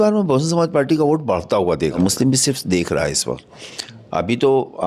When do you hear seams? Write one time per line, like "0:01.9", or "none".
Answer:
0:02.0